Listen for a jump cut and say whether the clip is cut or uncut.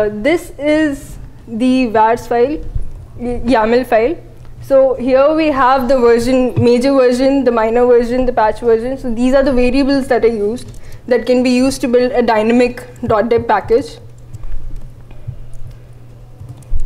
uncut